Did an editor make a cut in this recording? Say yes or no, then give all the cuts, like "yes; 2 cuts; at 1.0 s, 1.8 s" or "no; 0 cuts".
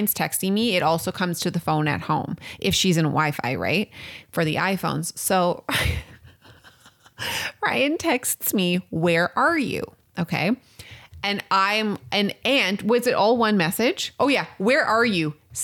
no; 0 cuts